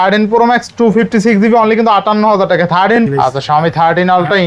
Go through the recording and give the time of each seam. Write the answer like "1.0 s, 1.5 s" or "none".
3.0 s